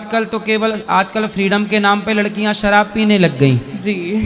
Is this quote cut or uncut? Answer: uncut